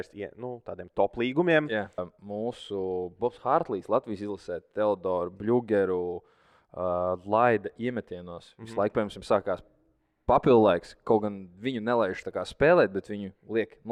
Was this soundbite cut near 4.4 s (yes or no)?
no